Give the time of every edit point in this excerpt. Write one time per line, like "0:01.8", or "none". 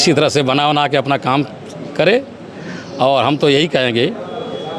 none